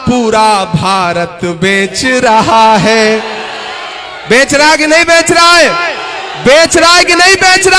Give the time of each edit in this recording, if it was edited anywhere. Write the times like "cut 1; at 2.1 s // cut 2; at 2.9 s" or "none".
none